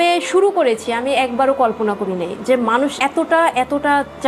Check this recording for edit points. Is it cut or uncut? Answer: uncut